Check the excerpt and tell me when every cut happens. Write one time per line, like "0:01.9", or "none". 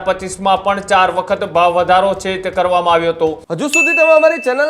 0:03.4